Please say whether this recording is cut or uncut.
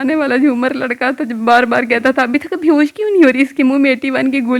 uncut